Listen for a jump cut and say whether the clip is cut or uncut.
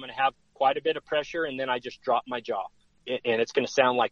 cut